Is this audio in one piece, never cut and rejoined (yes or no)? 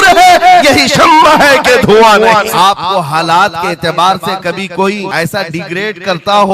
no